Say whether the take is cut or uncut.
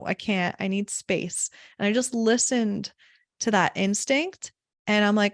uncut